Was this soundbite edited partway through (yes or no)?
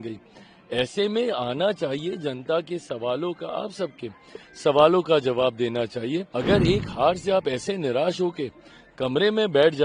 yes